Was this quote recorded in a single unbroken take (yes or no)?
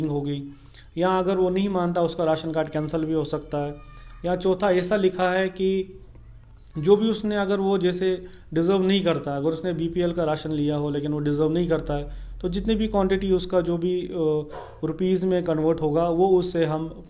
yes